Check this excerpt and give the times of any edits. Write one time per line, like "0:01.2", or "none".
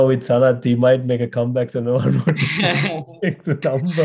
none